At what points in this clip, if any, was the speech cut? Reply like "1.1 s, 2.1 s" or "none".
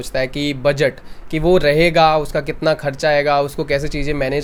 none